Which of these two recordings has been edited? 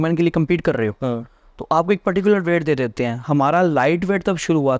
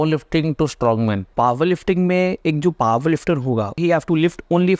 second; 2 cuts; at 1.3 s, 3.8 s

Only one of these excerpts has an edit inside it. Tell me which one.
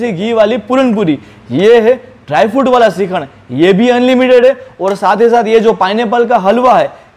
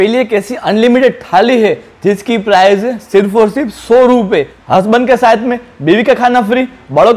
second; 1 cut; at 4.6 s

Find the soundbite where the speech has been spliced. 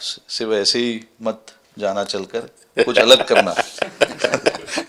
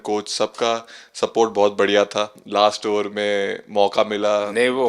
second; 1 cut; at 2.4 s

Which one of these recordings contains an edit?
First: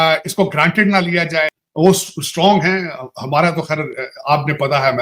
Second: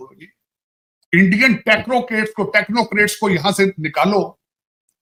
first; 1 cut; at 1.6 s

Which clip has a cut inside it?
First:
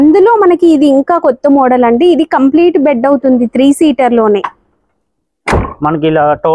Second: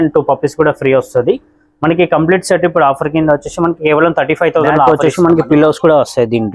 second; 1 cut; at 4.9 s

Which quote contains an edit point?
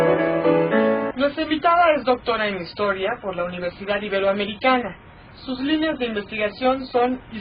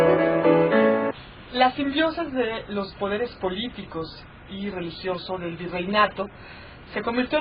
first; 1 cut; at 1.1 s

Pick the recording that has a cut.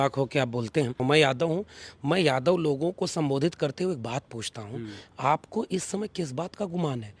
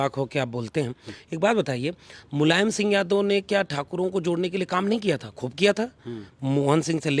first; 1 cut; at 1.0 s

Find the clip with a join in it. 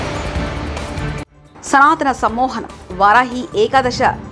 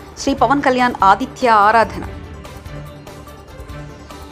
first; 1 cut; at 1.1 s

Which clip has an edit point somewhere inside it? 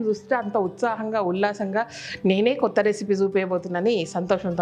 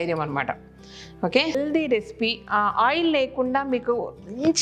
second; 1 cut; at 1.6 s

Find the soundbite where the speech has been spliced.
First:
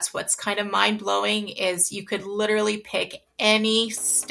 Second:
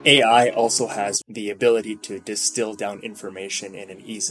second; 1 cut; at 1.2 s

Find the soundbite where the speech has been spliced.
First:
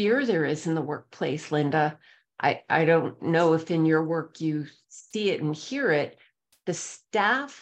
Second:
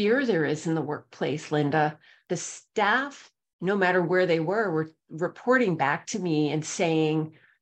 second; 1 cut; at 2.1 s

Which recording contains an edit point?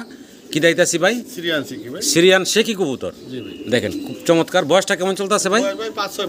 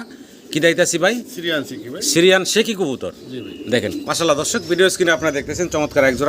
second; 1 cut; at 4.0 s

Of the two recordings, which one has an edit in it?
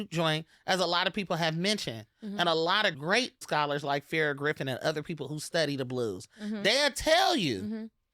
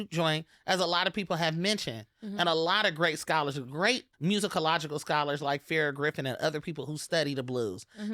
first; 1 cut; at 3.2 s

